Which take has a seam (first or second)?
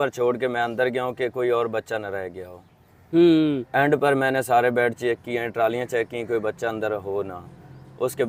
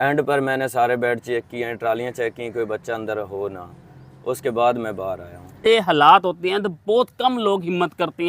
second